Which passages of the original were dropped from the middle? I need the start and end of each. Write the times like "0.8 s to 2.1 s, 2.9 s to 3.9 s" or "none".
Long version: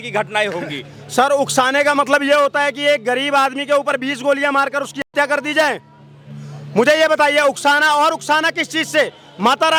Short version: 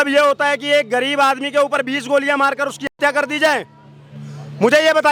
none